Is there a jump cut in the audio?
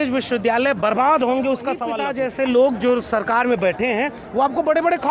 yes; 1 cut; at 2.0 s

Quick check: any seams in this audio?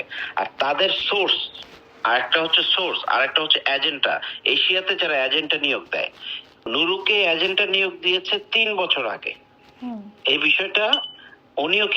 yes; 1 cut; at 6.6 s

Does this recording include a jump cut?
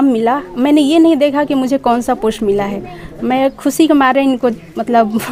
no; 0 cuts

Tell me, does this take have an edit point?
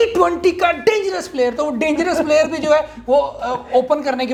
no; 0 cuts

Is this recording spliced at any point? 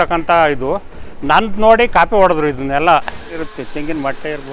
yes; 1 cut; at 3.5 s

